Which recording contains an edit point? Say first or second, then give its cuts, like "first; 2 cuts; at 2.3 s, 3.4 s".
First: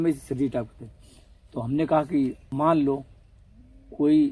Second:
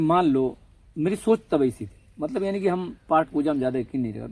first; 1 cut; at 2.4 s